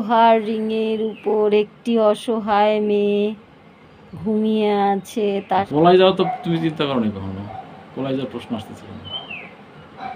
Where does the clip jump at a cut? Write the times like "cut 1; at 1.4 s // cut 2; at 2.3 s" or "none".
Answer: cut 1; at 5.7 s